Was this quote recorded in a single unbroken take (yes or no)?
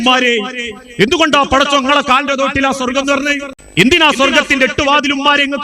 no